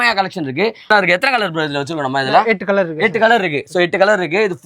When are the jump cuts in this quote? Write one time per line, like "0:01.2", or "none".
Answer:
0:00.9

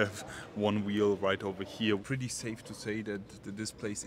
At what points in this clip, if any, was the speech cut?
0:02.0

